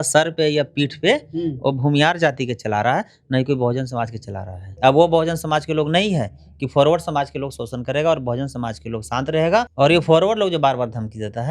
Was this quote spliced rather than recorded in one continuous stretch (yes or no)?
yes